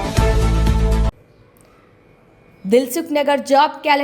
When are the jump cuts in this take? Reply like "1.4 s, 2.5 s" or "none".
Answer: 1.1 s